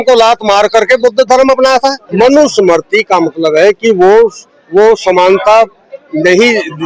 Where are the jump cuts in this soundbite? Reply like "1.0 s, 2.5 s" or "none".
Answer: 2.1 s